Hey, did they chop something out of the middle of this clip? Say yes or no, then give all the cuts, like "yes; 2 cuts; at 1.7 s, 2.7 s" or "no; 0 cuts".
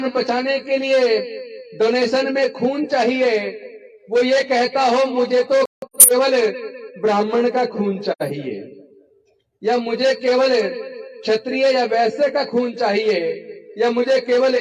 no; 0 cuts